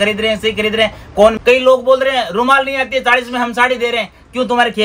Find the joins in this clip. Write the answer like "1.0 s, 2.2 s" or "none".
1.4 s